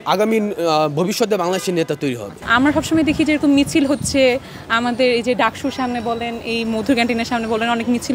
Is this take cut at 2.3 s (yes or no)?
yes